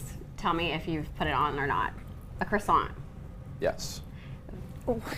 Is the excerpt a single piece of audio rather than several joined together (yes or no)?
yes